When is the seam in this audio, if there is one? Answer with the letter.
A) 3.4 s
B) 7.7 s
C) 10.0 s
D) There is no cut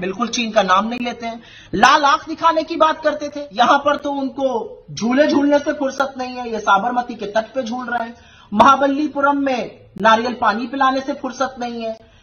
A